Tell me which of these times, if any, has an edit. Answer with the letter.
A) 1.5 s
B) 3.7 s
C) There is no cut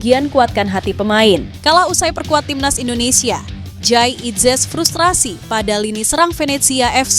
A